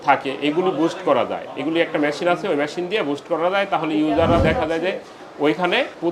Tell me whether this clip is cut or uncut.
uncut